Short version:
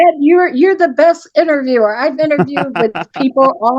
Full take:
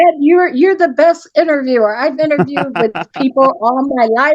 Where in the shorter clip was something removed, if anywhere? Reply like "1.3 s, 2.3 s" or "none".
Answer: none